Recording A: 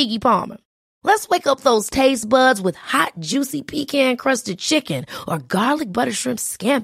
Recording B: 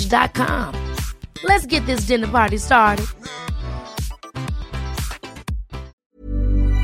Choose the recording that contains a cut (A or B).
B